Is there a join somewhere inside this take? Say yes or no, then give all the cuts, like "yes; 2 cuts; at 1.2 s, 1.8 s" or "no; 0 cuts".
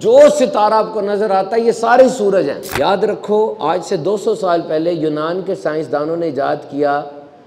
yes; 1 cut; at 2.6 s